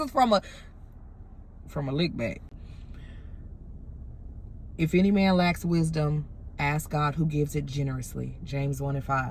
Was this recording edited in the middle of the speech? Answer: yes; 1 cut; at 2.5 s

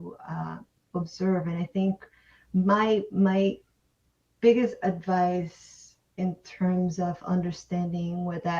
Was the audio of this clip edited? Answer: no; 0 cuts

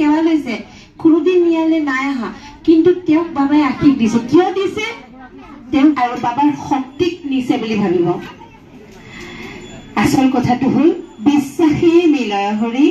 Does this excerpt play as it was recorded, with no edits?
no; 1 cut; at 6.0 s

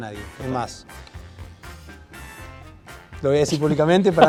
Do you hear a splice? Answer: no; 0 cuts

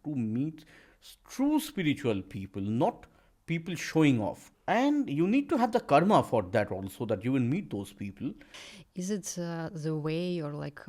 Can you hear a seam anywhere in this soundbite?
yes; 2 cuts; at 4.5 s, 8.6 s

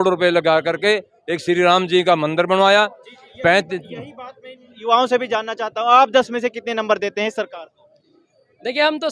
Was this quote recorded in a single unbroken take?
yes; 0 cuts

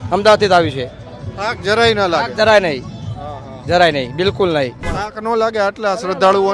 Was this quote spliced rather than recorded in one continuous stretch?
yes; 1 cut; at 4.9 s

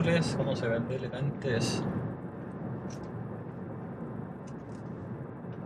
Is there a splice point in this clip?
no; 0 cuts

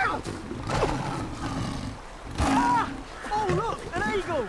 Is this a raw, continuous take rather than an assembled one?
yes; 0 cuts

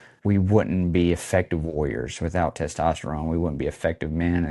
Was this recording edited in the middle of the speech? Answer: no; 0 cuts

